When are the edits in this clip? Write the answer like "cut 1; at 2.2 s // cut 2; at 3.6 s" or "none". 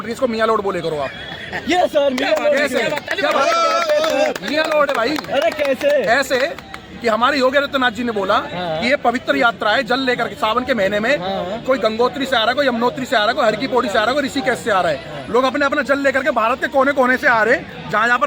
none